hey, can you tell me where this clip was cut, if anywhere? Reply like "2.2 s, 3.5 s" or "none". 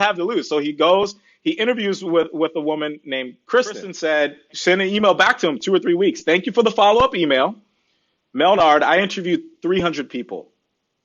3.9 s